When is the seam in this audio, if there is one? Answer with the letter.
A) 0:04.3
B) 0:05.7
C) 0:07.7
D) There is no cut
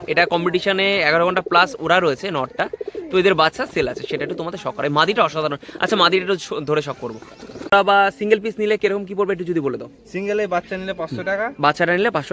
C